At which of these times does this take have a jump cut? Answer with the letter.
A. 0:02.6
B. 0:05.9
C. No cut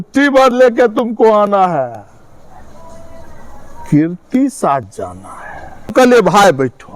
B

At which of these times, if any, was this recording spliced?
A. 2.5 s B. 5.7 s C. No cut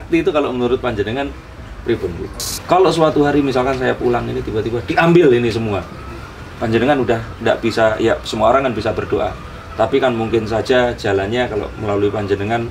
A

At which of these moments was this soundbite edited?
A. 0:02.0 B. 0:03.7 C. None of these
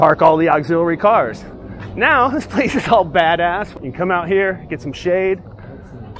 B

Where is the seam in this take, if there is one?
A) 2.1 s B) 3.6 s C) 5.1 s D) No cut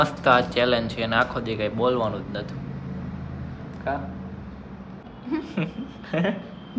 C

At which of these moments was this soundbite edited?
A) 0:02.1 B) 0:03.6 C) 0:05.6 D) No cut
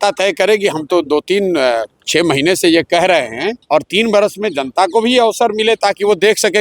B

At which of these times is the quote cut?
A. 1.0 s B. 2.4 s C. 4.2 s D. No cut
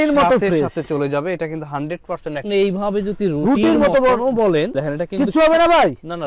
B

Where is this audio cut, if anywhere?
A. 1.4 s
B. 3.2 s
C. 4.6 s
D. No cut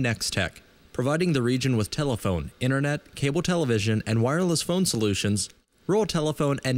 D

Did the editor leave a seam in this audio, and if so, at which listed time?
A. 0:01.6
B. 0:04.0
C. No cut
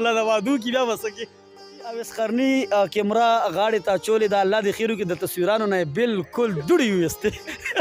A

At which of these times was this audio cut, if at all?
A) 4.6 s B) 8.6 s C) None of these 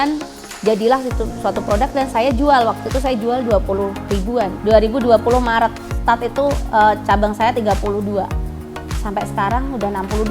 A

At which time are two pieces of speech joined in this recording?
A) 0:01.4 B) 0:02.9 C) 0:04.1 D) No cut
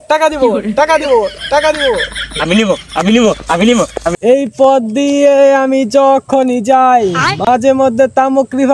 C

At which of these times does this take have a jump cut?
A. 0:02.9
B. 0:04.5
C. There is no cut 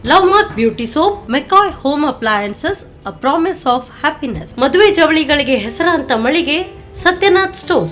C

